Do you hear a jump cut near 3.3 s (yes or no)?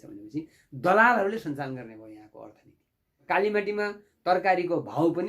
yes